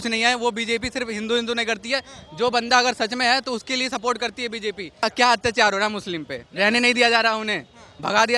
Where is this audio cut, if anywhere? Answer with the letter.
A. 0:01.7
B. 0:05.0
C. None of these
B